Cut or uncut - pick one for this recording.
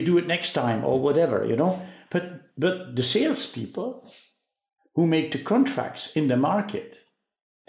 uncut